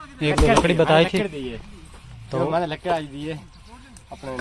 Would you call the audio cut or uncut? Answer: uncut